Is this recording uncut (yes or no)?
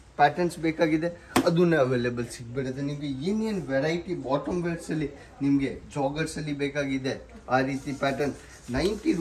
yes